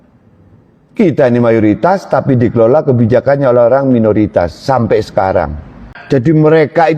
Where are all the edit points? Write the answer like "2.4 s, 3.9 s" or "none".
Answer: 5.9 s